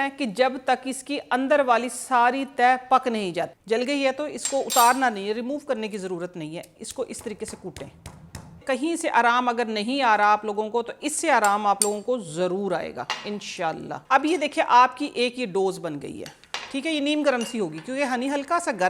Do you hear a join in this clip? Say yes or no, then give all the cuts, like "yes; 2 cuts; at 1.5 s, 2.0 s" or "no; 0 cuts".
yes; 3 cuts; at 3.6 s, 8.6 s, 14.0 s